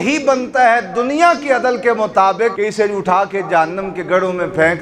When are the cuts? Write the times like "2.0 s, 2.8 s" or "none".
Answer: 2.6 s

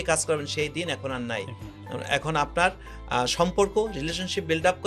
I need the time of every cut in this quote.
none

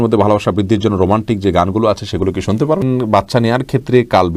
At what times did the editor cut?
2.8 s

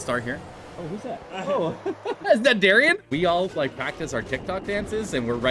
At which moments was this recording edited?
3.0 s

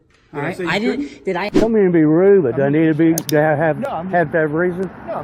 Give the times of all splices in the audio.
1.5 s

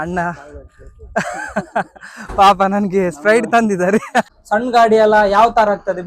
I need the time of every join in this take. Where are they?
4.4 s

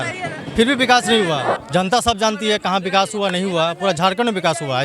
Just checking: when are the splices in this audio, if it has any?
1.5 s

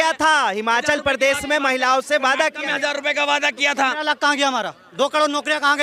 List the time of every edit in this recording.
none

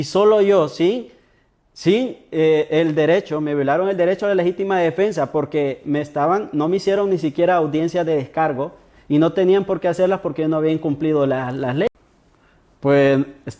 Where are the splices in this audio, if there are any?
11.9 s

